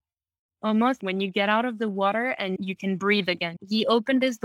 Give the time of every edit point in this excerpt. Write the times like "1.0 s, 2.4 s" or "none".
1.0 s, 2.6 s, 3.5 s